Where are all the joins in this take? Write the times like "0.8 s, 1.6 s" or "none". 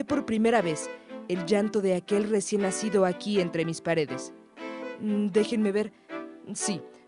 2.1 s